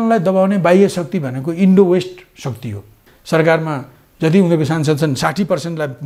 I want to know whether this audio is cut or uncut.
cut